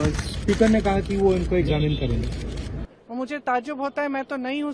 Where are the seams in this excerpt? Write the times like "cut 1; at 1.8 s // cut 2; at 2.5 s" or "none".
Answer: cut 1; at 2.8 s